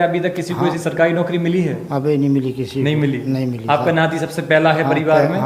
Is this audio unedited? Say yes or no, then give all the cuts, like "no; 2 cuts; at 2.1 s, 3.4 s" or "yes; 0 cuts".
yes; 0 cuts